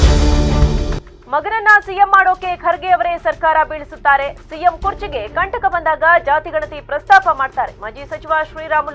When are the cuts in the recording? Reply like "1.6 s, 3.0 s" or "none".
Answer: none